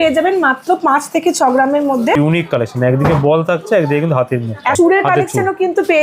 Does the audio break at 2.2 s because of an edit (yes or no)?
yes